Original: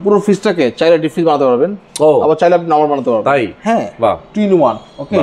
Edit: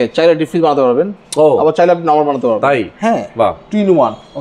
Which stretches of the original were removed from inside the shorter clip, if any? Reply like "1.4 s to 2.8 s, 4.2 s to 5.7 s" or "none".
none